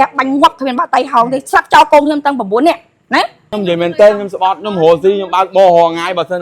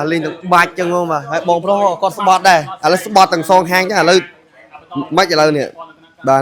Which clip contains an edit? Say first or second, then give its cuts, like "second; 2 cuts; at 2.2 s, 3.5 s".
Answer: first; 1 cut; at 3.5 s